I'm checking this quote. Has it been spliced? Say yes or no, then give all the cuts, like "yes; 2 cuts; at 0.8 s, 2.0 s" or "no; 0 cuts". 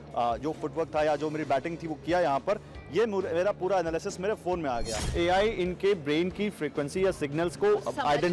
yes; 1 cut; at 5.0 s